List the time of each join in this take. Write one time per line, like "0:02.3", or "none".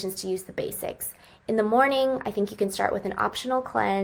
none